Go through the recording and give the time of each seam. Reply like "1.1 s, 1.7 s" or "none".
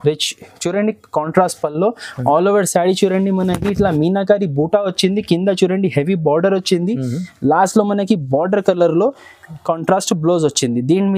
none

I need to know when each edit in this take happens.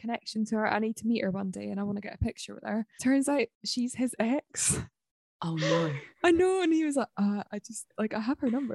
2.9 s, 3.6 s

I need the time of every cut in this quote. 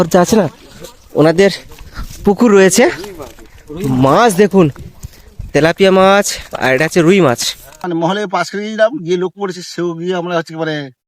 7.8 s

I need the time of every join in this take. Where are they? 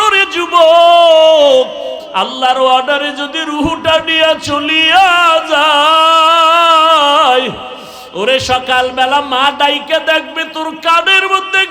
2.0 s

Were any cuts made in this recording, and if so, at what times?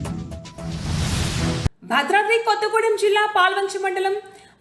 1.7 s

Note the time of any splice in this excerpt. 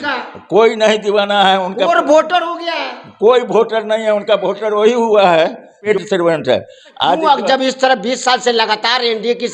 5.9 s, 7.2 s

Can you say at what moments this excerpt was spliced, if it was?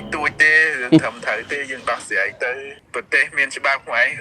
2.8 s

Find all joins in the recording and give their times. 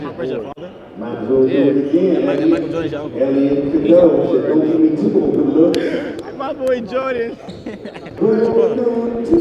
8.0 s

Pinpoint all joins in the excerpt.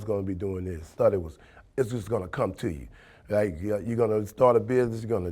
0.9 s

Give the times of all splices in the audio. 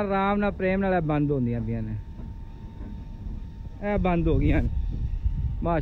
none

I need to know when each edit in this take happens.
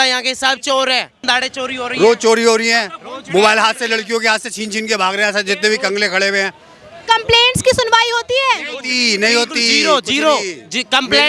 1.1 s

